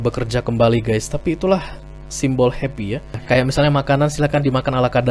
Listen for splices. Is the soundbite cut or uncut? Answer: cut